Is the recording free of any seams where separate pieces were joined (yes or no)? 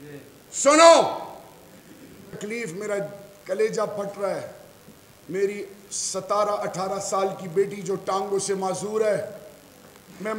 no